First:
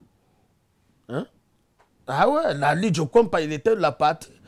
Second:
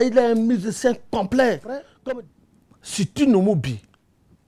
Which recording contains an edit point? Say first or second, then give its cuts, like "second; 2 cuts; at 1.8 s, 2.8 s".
second; 1 cut; at 2.1 s